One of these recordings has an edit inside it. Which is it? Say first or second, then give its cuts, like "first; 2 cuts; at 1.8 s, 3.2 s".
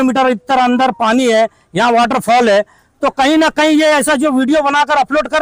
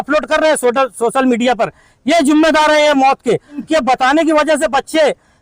second; 1 cut; at 3.7 s